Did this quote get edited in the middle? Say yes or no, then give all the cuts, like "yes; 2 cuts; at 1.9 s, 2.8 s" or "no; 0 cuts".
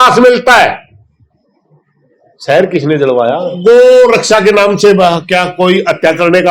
yes; 1 cut; at 3.5 s